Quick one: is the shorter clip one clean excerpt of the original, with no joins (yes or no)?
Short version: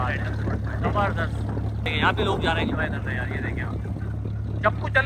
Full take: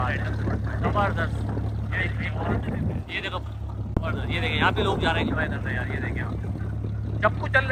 no